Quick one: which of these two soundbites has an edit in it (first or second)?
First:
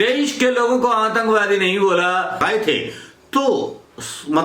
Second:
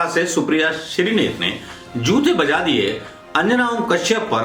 first